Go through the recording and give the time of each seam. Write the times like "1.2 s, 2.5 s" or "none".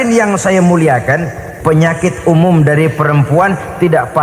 1.4 s